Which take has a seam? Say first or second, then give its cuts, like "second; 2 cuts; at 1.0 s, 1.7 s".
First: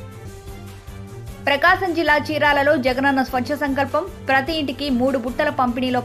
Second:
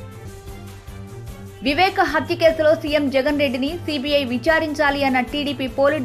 second; 1 cut; at 1.3 s